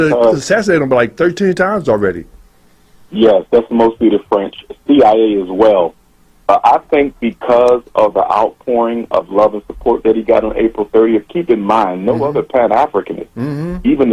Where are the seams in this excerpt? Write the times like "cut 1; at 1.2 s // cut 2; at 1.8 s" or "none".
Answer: none